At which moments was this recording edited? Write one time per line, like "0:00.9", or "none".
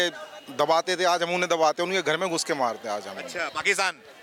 none